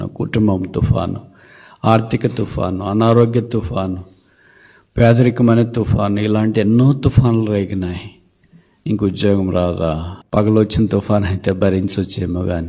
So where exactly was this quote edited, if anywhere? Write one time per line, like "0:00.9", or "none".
0:10.4